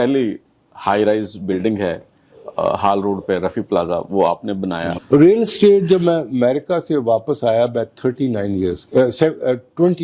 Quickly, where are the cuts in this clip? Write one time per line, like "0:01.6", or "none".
0:05.0